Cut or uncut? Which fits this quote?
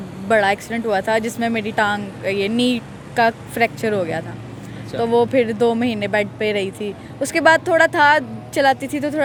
uncut